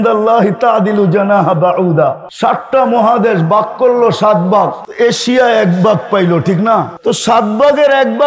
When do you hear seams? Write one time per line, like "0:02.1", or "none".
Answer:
0:02.3
0:04.8
0:06.9